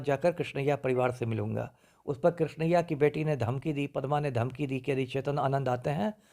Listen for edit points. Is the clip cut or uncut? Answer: uncut